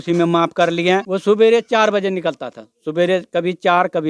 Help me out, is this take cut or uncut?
cut